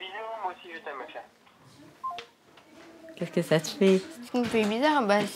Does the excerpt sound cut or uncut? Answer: uncut